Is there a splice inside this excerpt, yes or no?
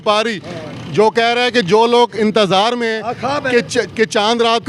yes